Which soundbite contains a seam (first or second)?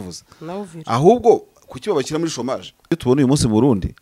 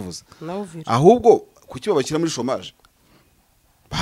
first